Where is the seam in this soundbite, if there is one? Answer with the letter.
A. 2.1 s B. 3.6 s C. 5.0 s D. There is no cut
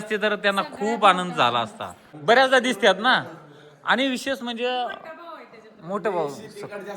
A